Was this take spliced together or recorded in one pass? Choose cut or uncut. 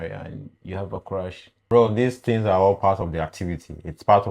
cut